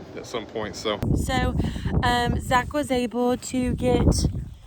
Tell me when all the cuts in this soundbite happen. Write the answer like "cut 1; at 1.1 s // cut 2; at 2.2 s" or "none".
cut 1; at 1.0 s